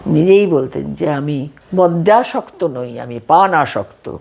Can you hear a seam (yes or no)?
yes